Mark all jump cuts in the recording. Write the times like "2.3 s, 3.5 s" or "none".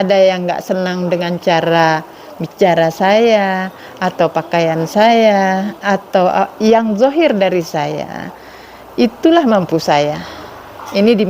none